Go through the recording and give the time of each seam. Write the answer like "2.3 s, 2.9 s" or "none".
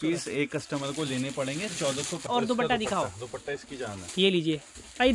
2.2 s